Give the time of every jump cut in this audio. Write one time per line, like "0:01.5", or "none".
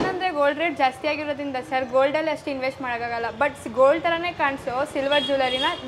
none

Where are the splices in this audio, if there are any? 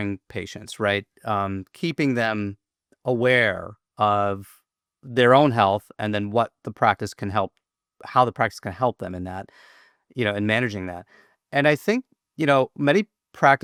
none

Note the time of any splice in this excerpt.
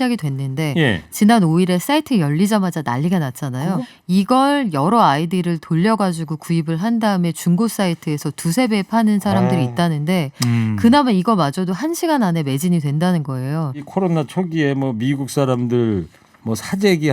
0:03.8
0:13.8

